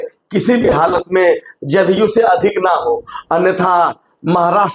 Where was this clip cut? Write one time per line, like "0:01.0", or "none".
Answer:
none